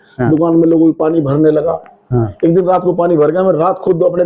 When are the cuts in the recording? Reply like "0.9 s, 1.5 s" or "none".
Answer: none